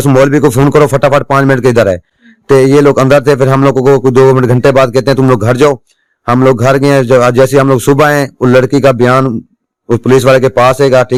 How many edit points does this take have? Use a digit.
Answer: 0